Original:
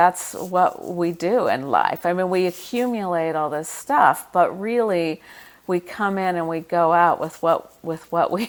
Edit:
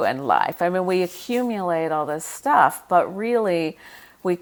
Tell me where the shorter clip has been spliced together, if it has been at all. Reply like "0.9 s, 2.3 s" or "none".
none